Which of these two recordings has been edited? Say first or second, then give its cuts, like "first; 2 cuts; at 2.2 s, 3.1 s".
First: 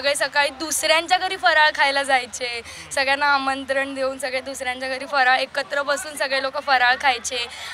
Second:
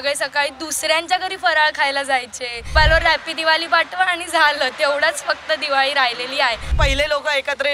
second; 2 cuts; at 2.7 s, 6.7 s